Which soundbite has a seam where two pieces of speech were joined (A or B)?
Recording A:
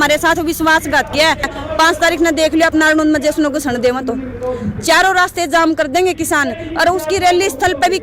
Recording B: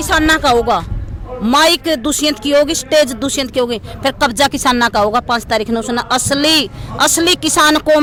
A